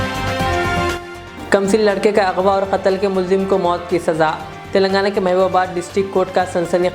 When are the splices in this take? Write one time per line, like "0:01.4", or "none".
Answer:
0:01.0